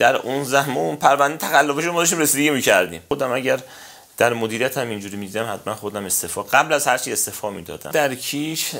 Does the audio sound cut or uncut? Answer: cut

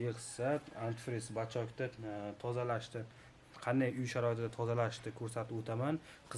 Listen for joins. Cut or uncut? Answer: uncut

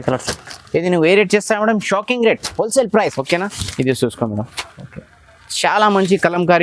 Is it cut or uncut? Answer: cut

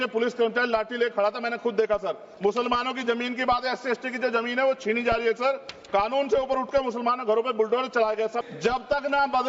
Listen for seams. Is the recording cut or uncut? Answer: cut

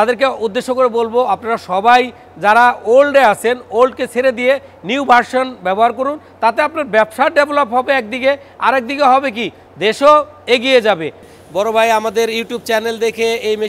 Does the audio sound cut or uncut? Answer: cut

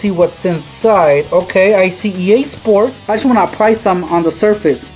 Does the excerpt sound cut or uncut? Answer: cut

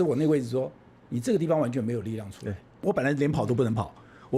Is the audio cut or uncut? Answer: cut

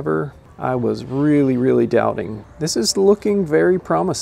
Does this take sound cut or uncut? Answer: cut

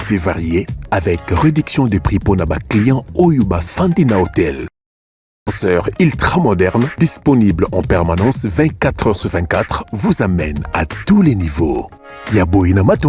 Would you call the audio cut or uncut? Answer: uncut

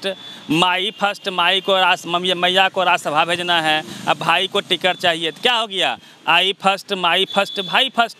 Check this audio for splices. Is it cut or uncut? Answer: uncut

